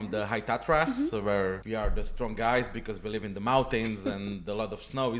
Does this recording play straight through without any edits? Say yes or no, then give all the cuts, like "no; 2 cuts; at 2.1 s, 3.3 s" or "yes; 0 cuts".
no; 1 cut; at 1.6 s